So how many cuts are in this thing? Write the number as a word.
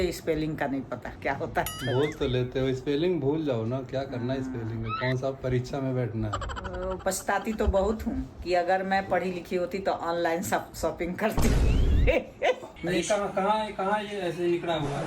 two